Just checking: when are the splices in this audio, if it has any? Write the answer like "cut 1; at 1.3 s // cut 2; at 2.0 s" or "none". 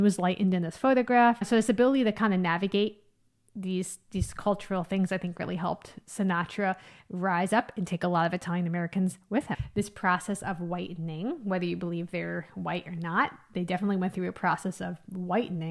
cut 1; at 1.4 s // cut 2; at 9.6 s